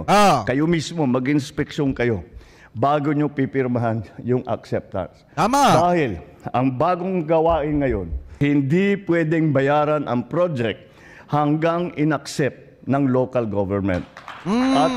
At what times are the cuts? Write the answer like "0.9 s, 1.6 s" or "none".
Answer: 8.2 s, 11.2 s